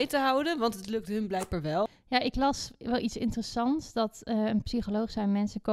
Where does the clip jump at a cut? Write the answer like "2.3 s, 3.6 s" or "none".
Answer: 1.9 s